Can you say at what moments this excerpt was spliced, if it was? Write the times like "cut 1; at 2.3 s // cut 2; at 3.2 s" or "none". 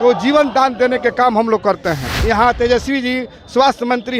cut 1; at 2.1 s